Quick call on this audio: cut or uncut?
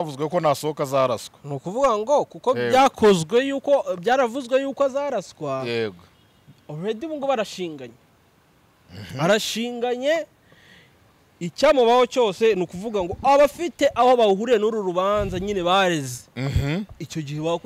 uncut